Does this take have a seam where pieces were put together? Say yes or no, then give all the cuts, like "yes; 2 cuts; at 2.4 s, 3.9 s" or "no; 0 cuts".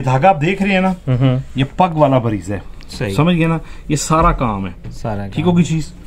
no; 0 cuts